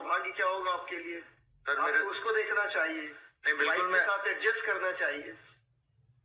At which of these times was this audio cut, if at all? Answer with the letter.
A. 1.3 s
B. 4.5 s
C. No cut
C